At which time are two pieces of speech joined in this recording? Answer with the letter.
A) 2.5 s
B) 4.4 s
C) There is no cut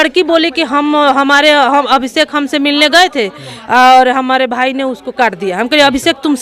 C